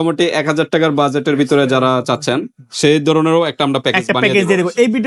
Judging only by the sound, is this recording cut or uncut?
uncut